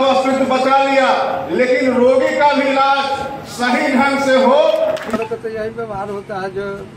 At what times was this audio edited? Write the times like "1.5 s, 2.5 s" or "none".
5.1 s